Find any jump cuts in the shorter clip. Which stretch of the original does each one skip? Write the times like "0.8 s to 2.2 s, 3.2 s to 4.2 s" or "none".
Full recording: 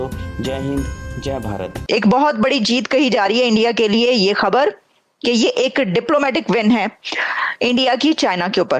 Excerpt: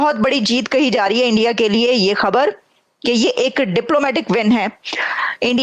none